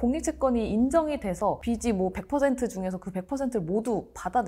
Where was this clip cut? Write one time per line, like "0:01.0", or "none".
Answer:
none